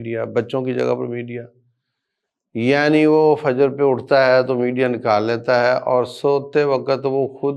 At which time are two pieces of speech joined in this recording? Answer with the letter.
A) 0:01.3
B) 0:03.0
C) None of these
C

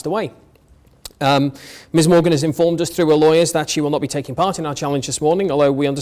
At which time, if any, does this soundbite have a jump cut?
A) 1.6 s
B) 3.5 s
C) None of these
A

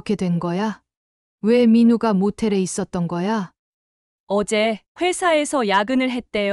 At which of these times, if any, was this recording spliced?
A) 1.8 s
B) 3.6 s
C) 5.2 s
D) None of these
B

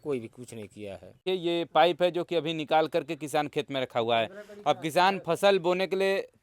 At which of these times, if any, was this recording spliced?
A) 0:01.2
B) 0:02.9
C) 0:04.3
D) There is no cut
A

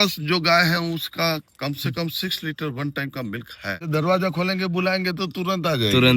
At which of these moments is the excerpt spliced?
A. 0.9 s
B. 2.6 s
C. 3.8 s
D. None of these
C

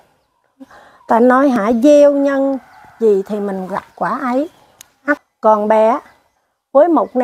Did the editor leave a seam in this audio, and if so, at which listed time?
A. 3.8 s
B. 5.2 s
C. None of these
B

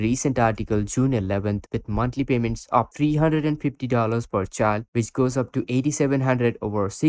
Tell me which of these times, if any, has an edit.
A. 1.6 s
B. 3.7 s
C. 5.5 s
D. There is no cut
A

